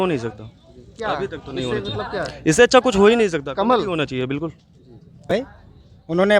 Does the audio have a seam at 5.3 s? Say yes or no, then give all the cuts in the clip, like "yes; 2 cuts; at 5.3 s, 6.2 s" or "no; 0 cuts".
yes; 1 cut; at 5.3 s